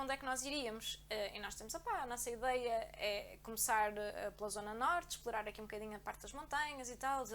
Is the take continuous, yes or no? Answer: yes